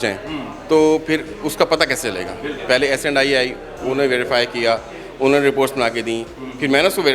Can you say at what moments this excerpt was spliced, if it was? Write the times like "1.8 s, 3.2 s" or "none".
2.5 s